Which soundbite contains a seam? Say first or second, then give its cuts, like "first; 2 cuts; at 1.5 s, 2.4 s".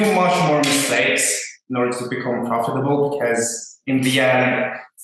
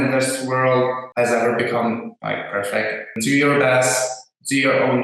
second; 3 cuts; at 1.0 s, 2.1 s, 3.2 s